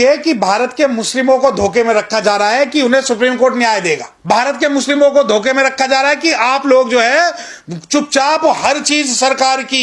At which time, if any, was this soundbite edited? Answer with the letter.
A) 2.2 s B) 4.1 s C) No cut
B